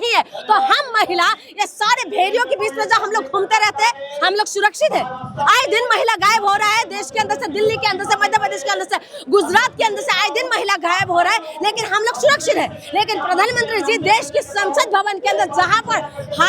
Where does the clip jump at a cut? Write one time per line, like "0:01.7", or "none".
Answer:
none